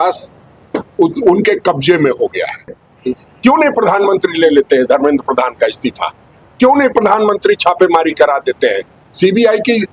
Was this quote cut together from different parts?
yes; 1 cut; at 2.9 s

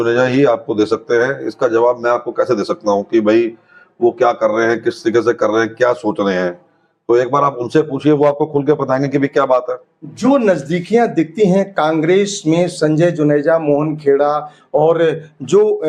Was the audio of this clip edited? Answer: no; 0 cuts

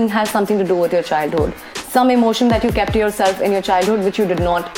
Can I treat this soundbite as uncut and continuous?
yes; 0 cuts

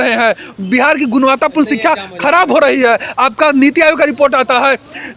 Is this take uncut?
yes; 0 cuts

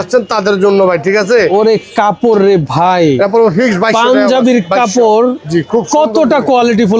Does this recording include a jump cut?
no; 0 cuts

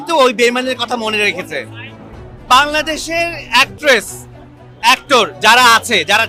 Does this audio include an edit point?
no; 0 cuts

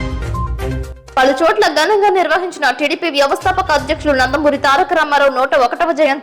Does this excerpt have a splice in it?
yes; 1 cut; at 0.9 s

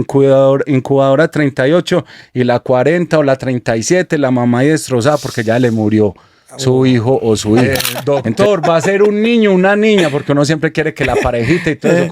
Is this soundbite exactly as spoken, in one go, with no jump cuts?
no; 1 cut; at 7.8 s

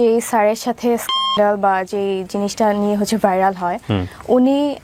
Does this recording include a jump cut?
no; 0 cuts

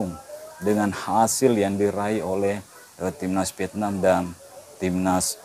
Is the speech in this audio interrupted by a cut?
no; 0 cuts

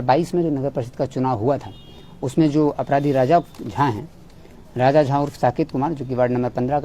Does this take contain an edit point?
no; 0 cuts

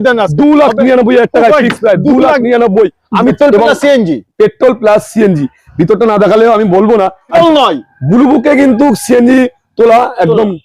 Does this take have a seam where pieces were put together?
yes; 2 cuts; at 3.3 s, 7.3 s

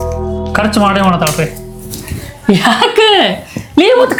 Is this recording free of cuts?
yes; 0 cuts

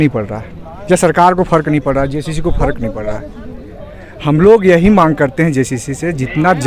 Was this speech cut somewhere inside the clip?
no; 0 cuts

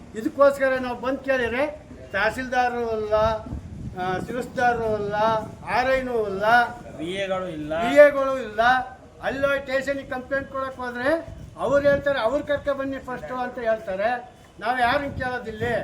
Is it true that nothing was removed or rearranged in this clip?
yes; 0 cuts

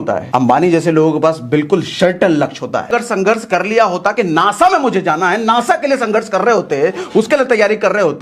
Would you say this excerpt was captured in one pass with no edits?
no; 1 cut; at 2.9 s

